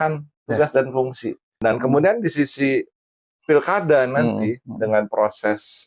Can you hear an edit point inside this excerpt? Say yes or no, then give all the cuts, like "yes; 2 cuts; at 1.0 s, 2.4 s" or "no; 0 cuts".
yes; 1 cut; at 1.6 s